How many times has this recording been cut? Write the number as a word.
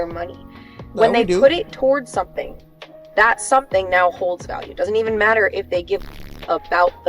one